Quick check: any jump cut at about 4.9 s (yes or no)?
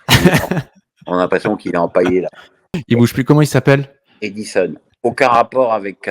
yes